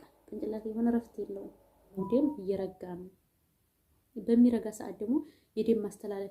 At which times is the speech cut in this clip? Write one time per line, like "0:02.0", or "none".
0:02.0